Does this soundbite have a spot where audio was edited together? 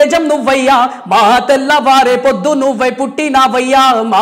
no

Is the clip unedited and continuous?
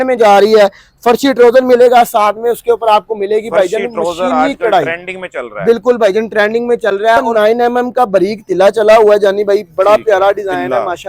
no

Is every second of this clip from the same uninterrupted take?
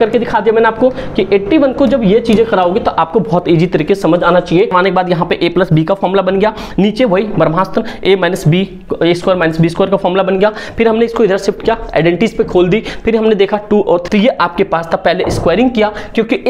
no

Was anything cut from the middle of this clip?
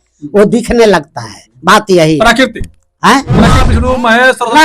yes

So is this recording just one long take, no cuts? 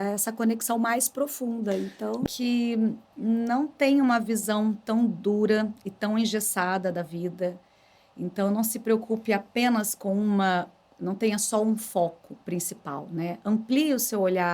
no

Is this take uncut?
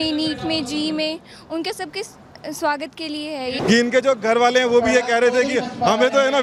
no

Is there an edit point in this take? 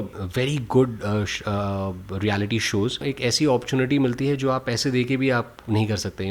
yes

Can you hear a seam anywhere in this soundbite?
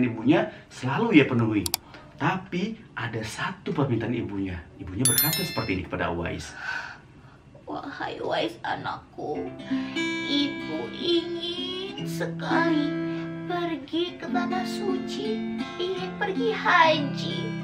no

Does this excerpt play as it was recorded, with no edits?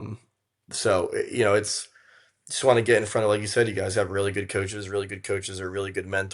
yes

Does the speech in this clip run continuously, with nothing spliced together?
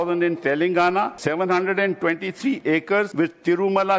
no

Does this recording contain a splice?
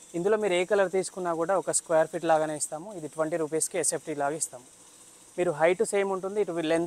no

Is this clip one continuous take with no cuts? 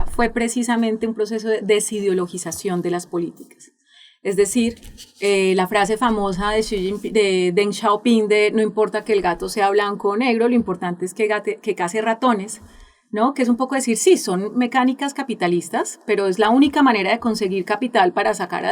yes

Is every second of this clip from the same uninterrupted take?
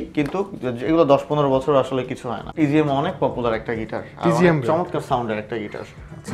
no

